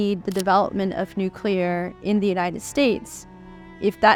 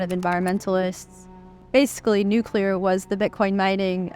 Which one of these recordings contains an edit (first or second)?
second